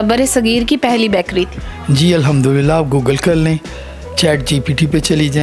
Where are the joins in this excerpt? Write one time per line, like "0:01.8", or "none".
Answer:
none